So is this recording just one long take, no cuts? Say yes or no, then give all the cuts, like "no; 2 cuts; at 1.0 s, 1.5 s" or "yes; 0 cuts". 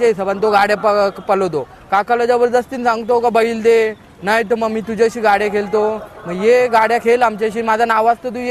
yes; 0 cuts